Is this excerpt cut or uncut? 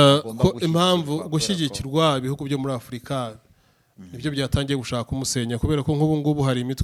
uncut